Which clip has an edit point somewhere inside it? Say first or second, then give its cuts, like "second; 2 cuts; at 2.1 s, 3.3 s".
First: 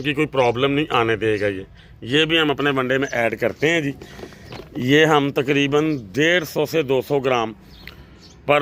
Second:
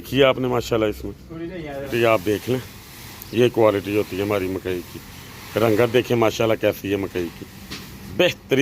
second; 1 cut; at 1.9 s